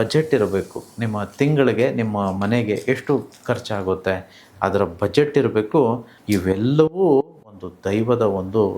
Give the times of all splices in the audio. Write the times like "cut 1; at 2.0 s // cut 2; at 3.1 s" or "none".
cut 1; at 6.1 s